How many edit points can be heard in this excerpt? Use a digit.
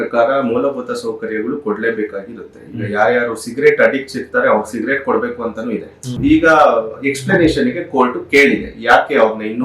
1